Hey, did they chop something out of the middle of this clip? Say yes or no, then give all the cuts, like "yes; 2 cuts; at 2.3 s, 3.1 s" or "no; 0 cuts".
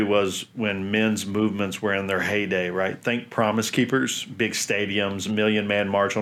no; 0 cuts